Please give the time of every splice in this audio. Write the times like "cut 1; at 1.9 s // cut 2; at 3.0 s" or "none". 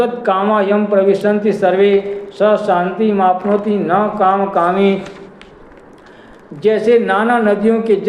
none